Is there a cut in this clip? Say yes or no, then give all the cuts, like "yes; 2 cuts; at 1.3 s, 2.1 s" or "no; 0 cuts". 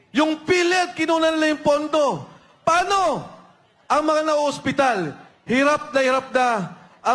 no; 0 cuts